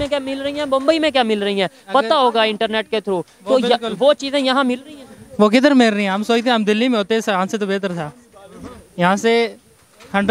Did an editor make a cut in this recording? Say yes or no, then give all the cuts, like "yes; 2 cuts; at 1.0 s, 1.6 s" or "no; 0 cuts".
no; 0 cuts